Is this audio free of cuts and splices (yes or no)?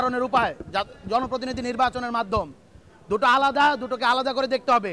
yes